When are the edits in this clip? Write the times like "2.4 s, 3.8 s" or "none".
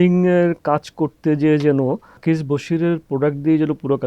2.1 s